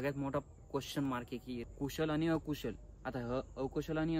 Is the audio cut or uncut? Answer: cut